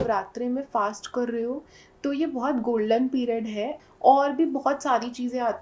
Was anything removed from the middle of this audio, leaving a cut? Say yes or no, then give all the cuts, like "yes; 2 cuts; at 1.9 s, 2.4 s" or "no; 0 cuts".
yes; 1 cut; at 3.8 s